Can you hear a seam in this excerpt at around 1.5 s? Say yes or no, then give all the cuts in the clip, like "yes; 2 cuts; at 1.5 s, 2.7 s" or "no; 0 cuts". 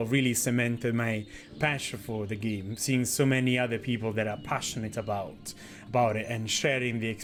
no; 0 cuts